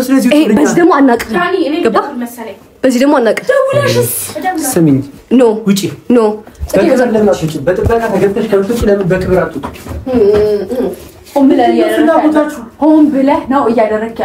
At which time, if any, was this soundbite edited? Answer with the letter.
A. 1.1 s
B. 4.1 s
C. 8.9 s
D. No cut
D